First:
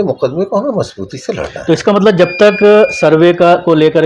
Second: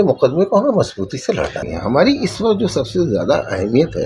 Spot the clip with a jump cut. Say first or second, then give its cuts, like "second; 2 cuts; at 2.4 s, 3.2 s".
second; 1 cut; at 1.6 s